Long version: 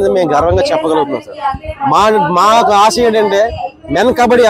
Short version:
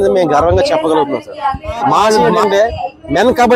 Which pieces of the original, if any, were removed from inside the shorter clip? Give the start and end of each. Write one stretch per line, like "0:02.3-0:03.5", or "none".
0:02.3-0:03.1